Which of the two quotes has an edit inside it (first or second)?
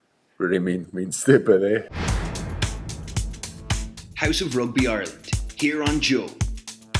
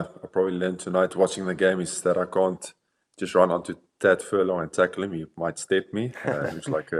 first